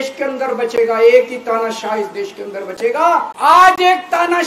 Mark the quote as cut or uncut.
cut